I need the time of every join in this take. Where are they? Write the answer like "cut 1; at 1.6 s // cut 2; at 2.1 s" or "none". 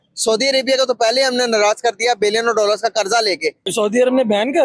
cut 1; at 3.7 s

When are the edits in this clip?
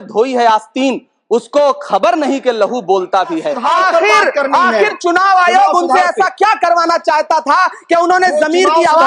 cut 1; at 3.6 s

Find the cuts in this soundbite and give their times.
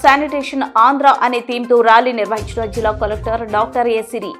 none

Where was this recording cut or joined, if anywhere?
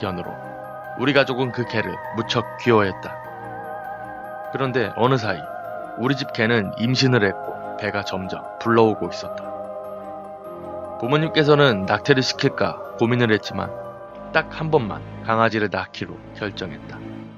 cut 1; at 16.4 s

